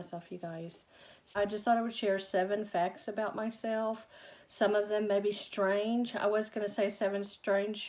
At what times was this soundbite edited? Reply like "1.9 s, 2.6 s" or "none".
1.3 s